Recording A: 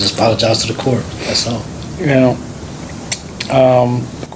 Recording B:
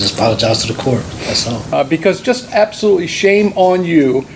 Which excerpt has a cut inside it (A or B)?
B